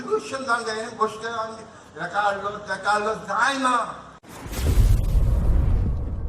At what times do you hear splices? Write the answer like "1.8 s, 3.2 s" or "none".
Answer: 4.2 s